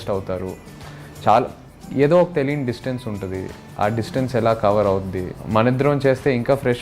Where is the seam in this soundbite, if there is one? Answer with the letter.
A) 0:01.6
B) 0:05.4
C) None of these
B